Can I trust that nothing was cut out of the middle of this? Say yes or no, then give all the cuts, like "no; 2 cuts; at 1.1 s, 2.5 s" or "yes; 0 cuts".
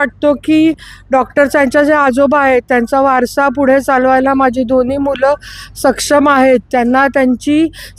yes; 0 cuts